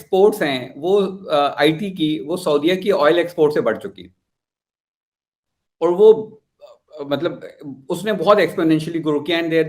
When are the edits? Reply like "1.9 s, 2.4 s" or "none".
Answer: none